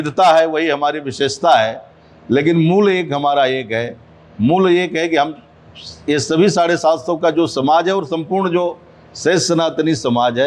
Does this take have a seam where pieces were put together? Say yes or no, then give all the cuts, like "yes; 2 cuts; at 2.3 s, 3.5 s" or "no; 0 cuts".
no; 0 cuts